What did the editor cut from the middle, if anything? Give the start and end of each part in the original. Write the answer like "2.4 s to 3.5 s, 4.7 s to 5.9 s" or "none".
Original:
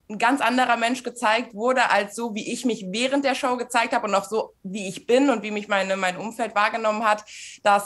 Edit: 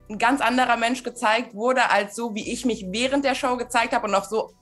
none